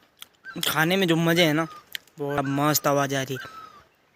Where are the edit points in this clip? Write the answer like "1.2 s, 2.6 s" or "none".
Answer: 2.4 s